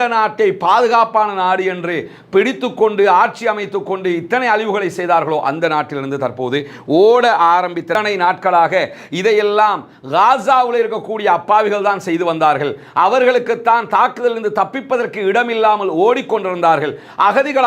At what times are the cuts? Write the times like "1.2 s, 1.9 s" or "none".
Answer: 7.9 s